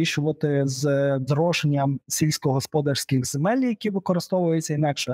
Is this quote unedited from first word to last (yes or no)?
yes